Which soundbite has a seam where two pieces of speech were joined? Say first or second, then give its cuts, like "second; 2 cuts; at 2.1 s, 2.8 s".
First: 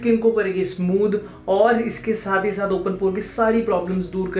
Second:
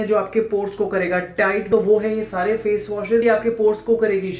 second; 2 cuts; at 1.6 s, 3.2 s